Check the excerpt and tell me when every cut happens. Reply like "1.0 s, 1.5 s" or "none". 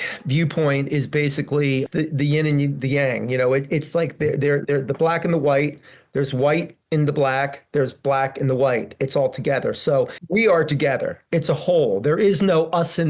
1.9 s, 10.2 s